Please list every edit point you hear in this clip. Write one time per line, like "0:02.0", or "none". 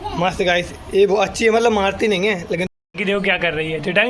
0:02.7